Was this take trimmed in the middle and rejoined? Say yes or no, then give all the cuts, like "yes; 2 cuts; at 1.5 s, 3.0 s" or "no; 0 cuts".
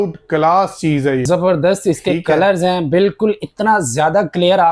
yes; 1 cut; at 1.2 s